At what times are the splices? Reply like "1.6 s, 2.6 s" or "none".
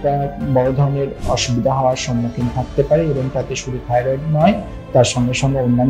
none